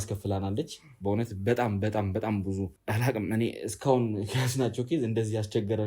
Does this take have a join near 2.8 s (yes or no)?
yes